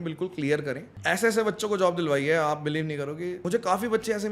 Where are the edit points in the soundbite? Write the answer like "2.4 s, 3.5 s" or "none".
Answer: 0.9 s, 3.4 s